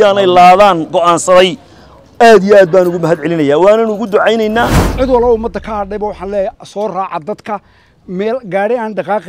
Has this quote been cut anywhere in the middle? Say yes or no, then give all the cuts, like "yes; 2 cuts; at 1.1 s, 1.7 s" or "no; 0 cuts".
yes; 1 cut; at 4.8 s